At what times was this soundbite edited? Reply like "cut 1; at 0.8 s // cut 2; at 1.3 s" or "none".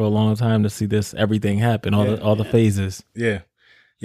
none